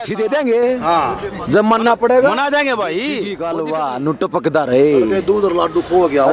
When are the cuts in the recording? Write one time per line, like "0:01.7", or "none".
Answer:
0:03.3

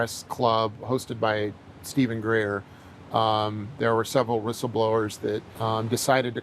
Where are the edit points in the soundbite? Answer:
0:05.5

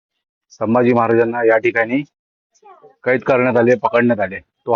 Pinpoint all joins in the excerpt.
none

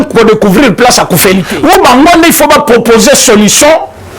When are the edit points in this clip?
0:01.5

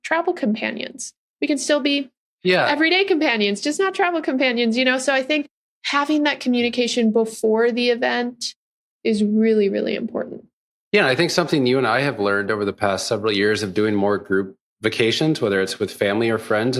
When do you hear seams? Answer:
none

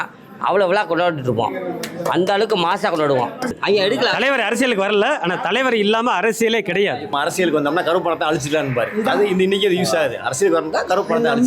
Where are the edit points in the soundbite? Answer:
0:03.5
0:07.1

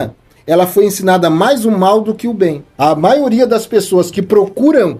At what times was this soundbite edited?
0:02.6

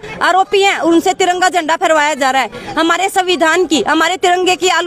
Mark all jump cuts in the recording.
none

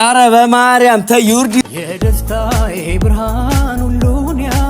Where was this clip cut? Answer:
0:01.6

